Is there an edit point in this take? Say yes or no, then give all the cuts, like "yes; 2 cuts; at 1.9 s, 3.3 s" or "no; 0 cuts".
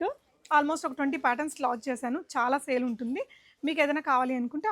no; 0 cuts